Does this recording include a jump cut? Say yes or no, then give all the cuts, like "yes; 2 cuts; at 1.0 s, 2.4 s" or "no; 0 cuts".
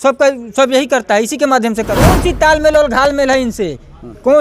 yes; 1 cut; at 2.1 s